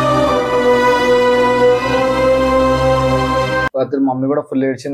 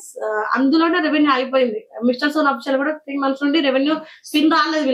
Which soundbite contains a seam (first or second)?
first